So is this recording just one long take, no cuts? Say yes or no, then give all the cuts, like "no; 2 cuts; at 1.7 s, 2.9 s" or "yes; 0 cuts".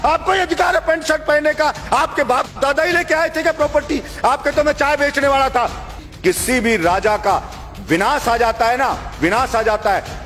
no; 1 cut; at 6.0 s